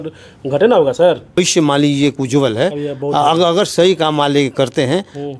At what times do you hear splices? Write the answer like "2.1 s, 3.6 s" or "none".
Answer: 1.4 s

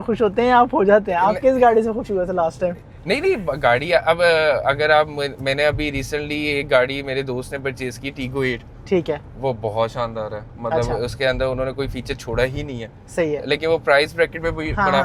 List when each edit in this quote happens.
none

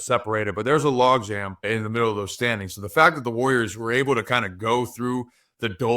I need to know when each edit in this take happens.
1.6 s

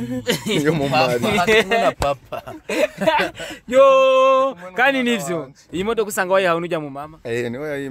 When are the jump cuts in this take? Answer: none

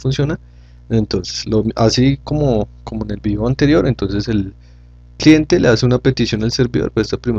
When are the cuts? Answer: none

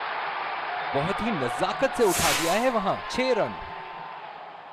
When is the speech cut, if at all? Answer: none

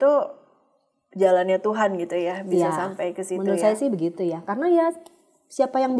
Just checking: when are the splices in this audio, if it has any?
none

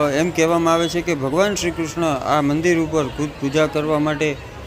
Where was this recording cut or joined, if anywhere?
none

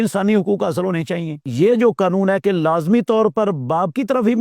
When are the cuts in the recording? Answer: 1.5 s

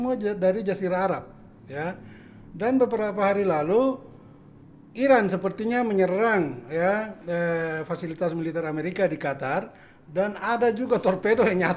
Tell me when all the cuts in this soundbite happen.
none

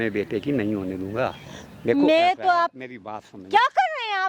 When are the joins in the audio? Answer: 1.5 s

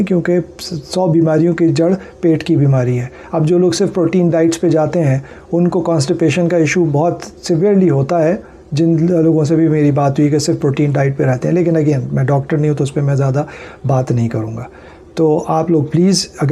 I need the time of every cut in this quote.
none

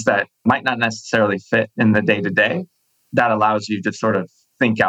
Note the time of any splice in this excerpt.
none

